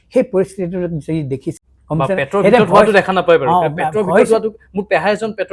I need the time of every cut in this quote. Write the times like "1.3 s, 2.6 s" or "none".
1.6 s